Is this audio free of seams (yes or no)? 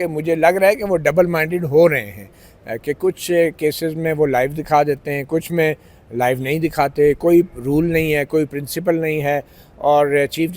yes